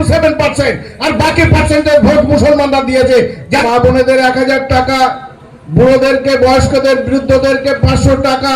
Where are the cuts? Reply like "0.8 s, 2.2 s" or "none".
3.6 s